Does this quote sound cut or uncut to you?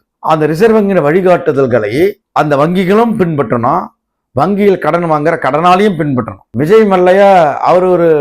cut